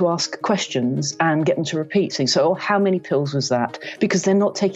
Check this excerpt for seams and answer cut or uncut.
uncut